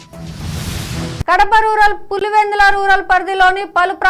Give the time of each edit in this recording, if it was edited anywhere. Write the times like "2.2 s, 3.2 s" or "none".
none